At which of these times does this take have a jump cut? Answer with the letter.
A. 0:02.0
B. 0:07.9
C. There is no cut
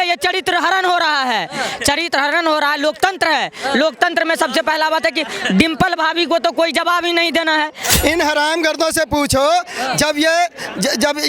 B